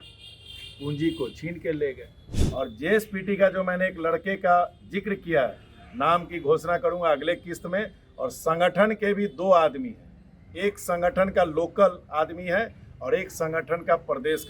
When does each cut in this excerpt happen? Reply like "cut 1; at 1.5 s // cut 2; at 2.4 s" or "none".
cut 1; at 2.4 s